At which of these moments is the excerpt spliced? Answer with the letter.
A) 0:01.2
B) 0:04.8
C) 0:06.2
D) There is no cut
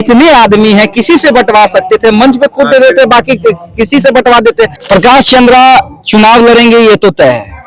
B